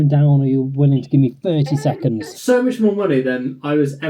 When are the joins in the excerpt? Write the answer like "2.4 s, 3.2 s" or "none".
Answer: 2.3 s